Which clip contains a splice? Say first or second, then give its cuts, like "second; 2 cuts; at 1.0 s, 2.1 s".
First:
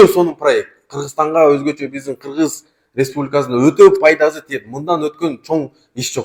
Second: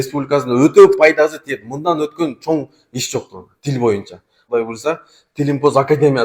second; 1 cut; at 4.4 s